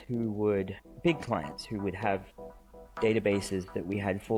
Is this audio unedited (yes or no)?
yes